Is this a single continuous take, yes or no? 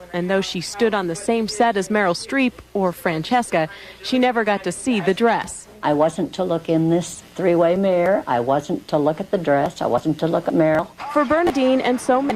no